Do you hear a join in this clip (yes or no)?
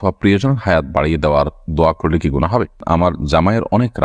yes